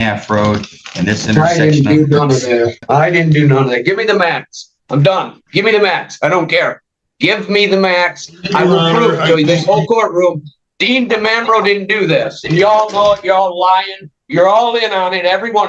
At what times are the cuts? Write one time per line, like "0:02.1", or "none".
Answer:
0:02.8